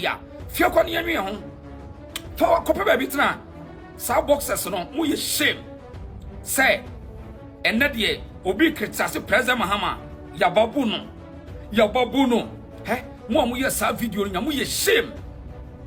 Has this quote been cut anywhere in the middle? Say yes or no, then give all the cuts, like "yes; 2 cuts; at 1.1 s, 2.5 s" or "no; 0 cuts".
no; 0 cuts